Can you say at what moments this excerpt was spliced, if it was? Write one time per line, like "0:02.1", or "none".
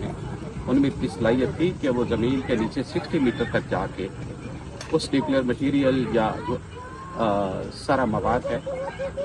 none